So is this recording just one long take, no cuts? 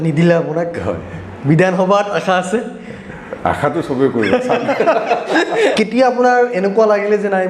no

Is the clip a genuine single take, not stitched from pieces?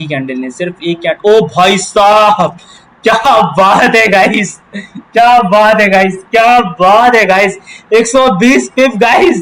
yes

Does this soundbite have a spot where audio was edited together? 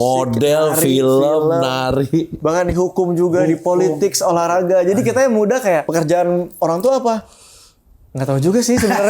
yes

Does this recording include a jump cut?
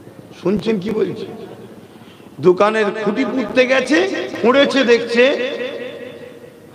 no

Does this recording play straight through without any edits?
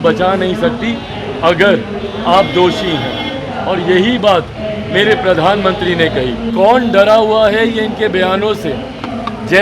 no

